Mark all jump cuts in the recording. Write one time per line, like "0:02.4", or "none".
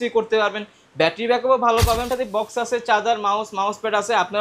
0:02.1

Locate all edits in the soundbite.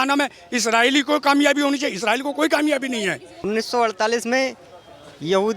0:03.3

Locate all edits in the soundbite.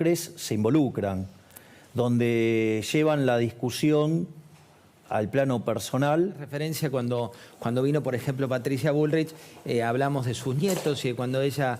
0:06.5

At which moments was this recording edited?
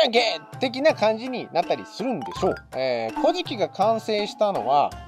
0:02.7

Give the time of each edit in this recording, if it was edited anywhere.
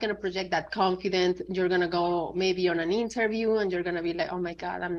none

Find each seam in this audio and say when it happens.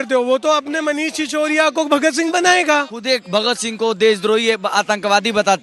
0:03.0

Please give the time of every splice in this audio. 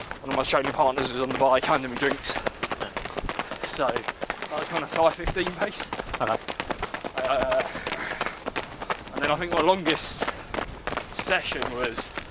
none

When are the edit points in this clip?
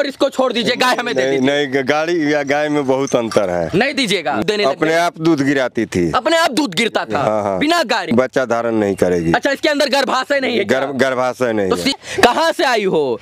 0:04.4
0:08.1
0:11.9

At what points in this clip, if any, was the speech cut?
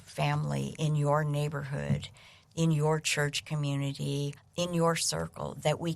0:04.4

